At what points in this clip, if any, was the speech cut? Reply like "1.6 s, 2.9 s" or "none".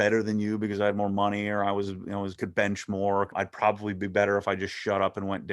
3.3 s